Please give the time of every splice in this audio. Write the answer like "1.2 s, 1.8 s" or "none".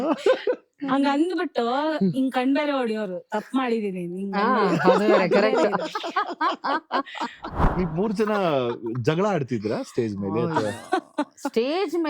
7.6 s